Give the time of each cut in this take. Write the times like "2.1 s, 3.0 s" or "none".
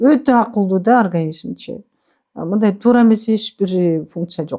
none